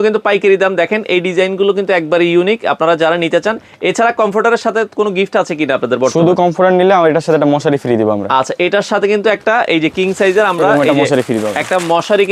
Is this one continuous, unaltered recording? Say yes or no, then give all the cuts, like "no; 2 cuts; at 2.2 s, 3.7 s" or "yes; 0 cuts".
yes; 0 cuts